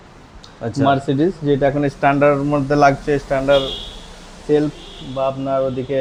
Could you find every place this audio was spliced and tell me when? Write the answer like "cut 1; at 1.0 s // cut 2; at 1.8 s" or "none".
none